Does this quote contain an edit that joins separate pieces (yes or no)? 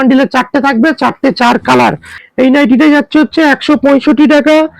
yes